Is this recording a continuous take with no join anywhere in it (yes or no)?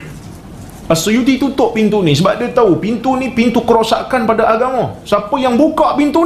yes